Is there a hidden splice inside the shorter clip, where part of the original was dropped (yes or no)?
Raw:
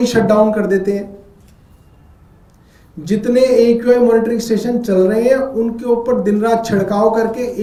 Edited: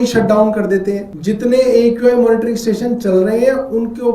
yes